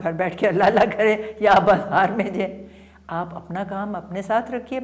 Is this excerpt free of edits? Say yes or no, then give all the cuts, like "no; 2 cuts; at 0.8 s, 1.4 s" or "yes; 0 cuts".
yes; 0 cuts